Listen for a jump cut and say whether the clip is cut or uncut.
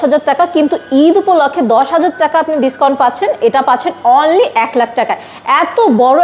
uncut